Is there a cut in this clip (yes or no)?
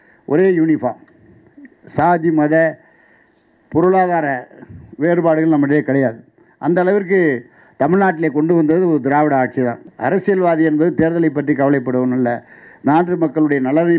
yes